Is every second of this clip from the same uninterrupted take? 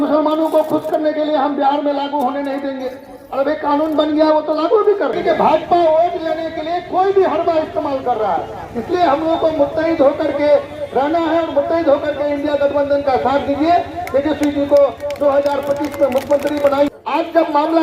no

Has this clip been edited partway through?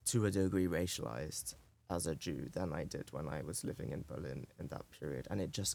no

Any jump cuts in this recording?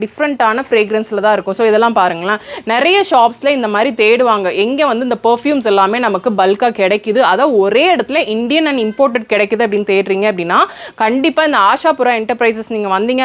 no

